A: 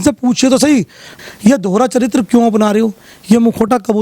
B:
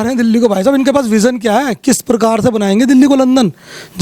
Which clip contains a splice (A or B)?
A